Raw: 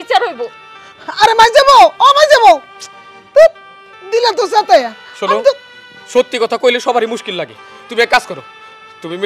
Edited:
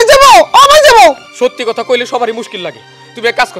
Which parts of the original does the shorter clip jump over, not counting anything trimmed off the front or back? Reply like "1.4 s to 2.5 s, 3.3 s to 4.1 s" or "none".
2.7 s to 6.0 s